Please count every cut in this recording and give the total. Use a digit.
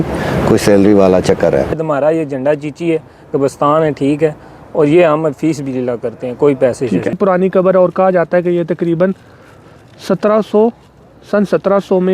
2